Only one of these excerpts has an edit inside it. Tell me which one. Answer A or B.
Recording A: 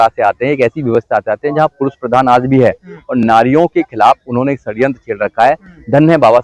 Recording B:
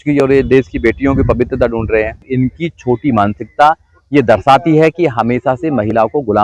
B